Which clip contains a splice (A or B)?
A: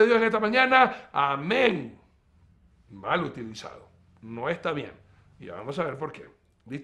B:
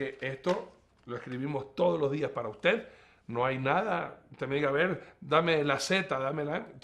B